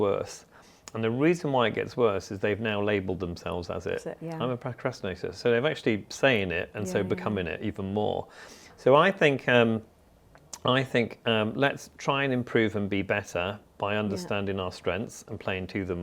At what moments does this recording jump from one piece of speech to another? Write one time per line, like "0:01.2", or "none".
none